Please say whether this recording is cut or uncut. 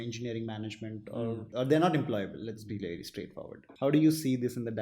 cut